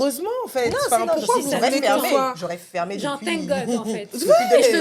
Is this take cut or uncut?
uncut